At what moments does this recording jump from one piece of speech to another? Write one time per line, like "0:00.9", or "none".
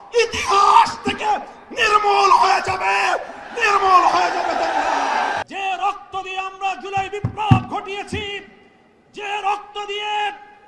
0:05.4